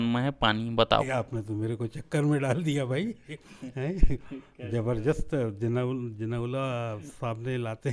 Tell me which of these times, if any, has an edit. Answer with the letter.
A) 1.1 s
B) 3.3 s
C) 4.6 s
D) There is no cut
A